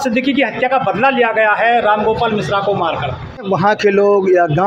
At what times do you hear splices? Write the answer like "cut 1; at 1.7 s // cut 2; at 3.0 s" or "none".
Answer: cut 1; at 3.5 s

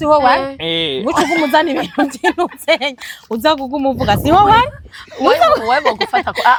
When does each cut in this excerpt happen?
none

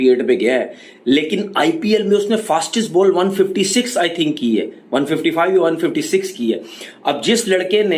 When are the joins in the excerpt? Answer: none

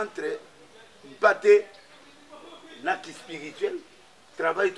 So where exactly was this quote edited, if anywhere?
none

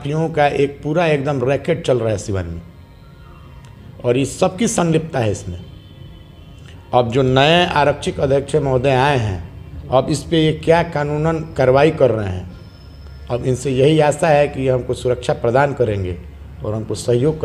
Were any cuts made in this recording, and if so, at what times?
none

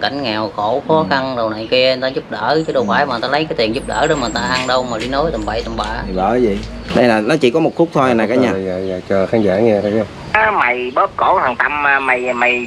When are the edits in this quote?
cut 1; at 6.7 s

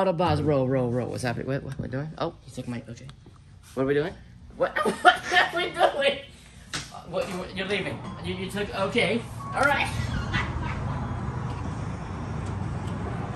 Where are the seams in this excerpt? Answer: none

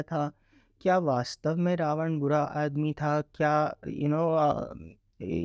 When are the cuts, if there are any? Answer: none

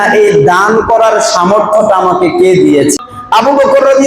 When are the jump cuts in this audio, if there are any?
cut 1; at 3.1 s

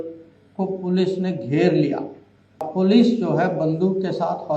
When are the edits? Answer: cut 1; at 2.7 s

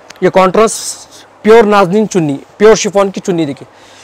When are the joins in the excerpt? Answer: none

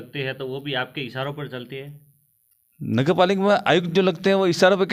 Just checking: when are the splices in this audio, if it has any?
none

